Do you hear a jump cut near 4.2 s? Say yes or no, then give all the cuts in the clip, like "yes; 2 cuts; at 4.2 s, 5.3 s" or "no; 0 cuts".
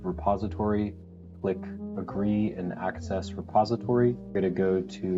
yes; 1 cut; at 4.2 s